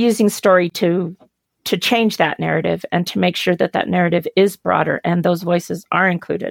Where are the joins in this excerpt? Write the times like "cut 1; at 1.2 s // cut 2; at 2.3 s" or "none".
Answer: none